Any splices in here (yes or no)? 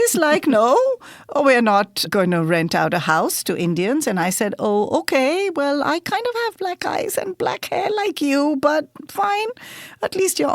yes